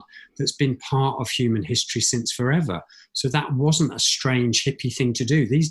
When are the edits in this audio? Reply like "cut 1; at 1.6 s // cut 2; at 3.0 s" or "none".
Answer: none